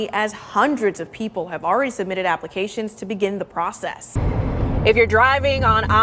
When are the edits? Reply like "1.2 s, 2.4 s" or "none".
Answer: 4.0 s